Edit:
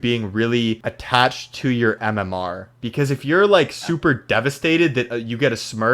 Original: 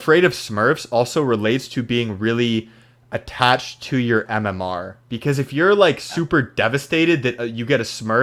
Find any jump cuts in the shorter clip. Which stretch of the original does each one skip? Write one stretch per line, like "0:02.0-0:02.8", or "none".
0:02.8-0:03.2

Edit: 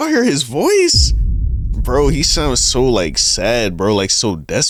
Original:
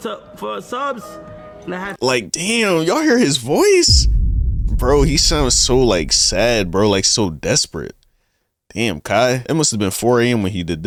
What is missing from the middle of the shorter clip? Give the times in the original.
none

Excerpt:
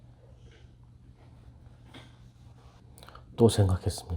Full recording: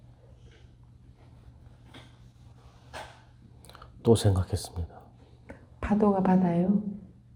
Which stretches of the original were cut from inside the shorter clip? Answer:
0:02.7-0:03.4

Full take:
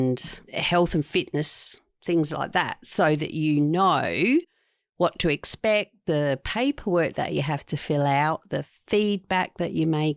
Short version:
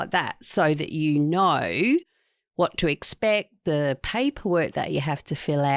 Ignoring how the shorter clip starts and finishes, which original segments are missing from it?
none

